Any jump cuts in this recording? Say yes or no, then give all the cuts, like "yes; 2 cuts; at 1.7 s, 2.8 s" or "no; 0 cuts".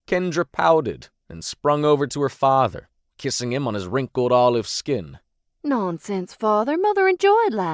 no; 0 cuts